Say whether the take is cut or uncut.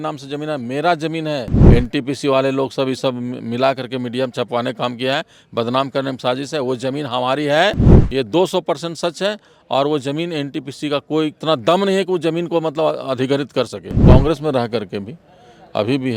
cut